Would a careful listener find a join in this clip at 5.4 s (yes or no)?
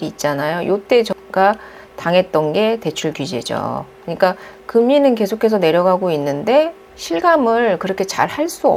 no